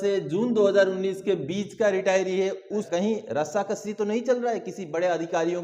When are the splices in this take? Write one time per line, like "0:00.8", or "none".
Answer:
0:02.9